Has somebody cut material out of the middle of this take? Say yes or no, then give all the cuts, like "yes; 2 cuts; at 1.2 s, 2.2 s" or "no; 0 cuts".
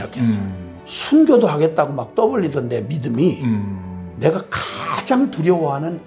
no; 0 cuts